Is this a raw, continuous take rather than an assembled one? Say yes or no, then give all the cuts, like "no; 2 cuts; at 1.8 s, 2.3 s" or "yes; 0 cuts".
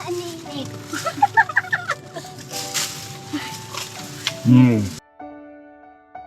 no; 1 cut; at 5.0 s